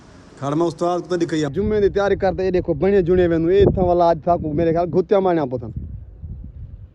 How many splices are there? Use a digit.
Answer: 1